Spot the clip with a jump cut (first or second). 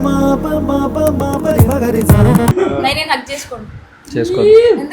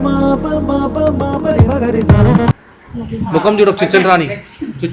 first